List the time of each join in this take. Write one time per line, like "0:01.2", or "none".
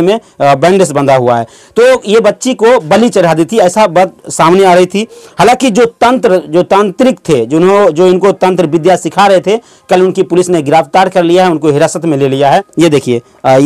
0:12.7